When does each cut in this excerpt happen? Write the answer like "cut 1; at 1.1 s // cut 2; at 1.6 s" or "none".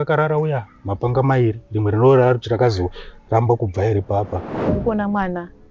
cut 1; at 4.7 s